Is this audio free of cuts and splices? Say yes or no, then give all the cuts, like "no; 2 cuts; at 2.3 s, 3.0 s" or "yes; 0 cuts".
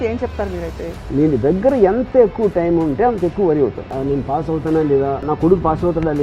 no; 3 cuts; at 1.0 s, 4.0 s, 5.3 s